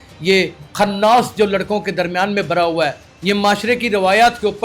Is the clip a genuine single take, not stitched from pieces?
no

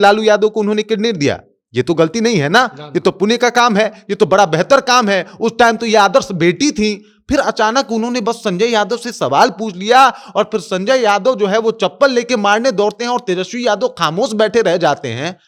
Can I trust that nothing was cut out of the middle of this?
yes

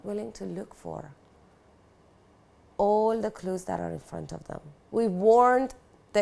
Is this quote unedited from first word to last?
no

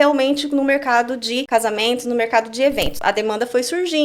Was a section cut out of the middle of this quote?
yes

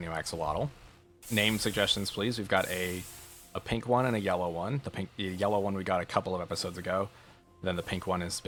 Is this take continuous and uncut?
yes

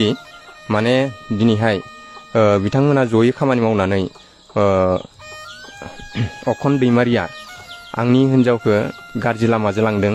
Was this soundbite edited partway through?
no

